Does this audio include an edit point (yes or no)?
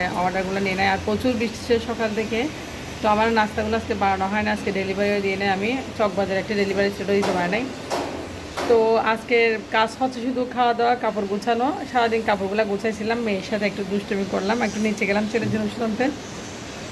no